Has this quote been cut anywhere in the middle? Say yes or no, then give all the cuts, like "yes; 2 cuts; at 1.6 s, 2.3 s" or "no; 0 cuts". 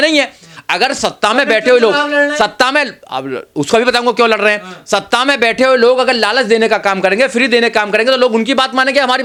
no; 0 cuts